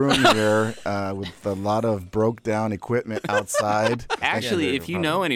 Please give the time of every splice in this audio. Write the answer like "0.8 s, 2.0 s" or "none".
4.2 s